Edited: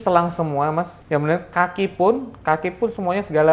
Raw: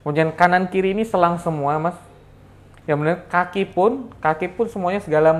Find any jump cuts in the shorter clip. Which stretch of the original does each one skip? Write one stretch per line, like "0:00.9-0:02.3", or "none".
0:02.0-0:02.7